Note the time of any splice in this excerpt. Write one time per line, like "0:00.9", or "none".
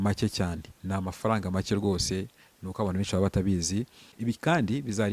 0:04.0